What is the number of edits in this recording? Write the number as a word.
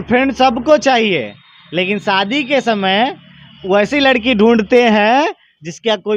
zero